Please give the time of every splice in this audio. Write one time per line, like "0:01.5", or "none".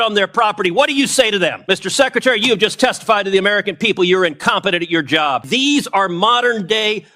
0:01.6
0:05.5

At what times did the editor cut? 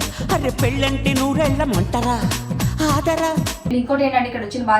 0:03.7

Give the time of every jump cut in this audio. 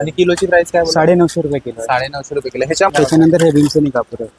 0:02.9

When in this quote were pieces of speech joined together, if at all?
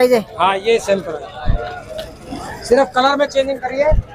none

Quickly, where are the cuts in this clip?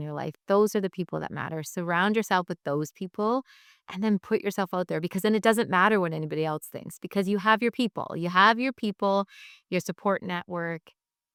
none

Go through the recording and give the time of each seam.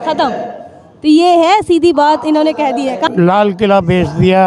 0:03.1

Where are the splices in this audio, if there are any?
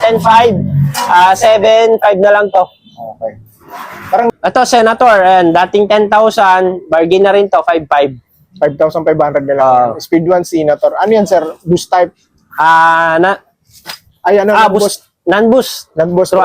0:04.3

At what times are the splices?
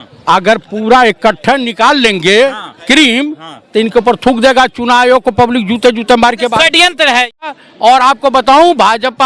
0:07.3

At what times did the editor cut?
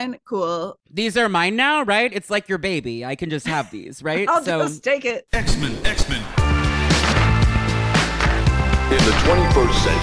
0:05.2

